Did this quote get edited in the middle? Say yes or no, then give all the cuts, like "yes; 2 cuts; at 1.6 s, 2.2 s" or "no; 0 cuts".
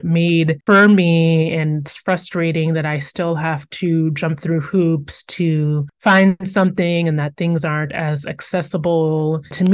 no; 0 cuts